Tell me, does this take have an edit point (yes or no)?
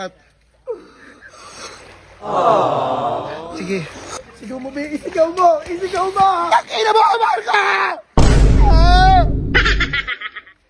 yes